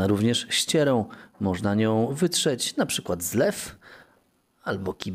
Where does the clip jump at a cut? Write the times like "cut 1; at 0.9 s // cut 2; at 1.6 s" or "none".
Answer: none